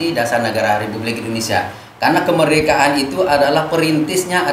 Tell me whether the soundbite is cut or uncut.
uncut